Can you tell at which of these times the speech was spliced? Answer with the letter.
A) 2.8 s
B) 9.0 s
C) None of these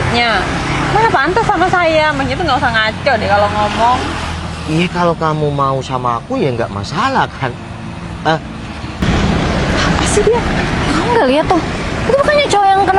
B